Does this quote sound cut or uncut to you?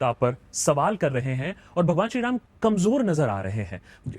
cut